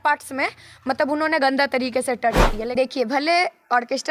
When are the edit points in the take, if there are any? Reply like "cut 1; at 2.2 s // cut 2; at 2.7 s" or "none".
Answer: cut 1; at 2.7 s